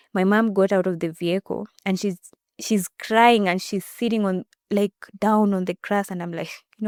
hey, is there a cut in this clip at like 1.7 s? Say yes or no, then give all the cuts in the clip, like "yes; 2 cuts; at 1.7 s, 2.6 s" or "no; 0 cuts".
no; 0 cuts